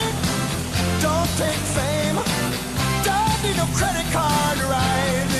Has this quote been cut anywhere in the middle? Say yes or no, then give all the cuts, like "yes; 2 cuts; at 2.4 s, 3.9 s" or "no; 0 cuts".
no; 0 cuts